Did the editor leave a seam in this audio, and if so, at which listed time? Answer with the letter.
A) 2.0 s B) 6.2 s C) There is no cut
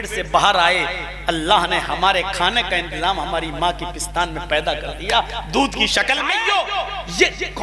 B